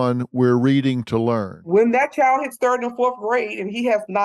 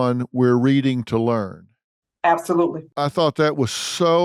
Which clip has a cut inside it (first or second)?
first